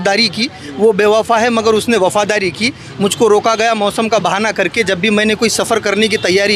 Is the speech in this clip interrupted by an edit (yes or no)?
no